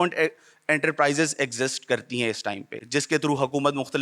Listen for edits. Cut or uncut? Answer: uncut